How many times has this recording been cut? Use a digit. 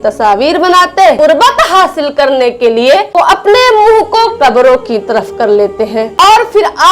2